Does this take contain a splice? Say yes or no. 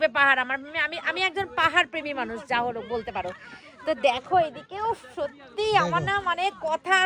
no